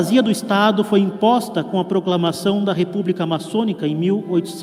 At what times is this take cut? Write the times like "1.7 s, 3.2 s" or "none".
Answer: none